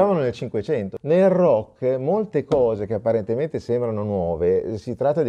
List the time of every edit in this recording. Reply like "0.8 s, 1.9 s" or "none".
0.9 s